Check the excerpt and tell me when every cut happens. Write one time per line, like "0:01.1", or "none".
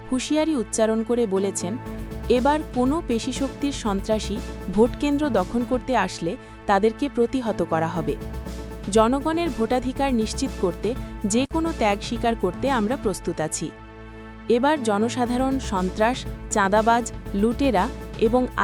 none